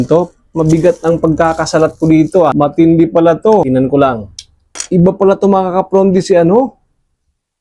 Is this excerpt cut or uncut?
cut